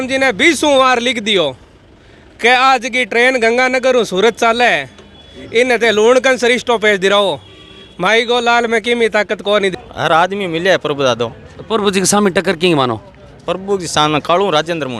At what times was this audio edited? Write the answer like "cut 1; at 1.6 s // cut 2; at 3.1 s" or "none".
cut 1; at 9.7 s